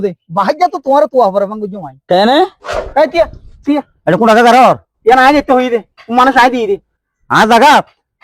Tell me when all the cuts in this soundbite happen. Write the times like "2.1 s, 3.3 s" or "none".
2.8 s